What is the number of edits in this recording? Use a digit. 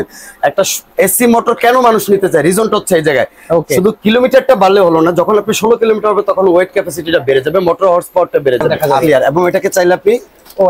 1